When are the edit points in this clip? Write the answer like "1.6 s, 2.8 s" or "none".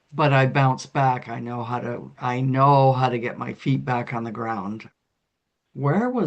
4.9 s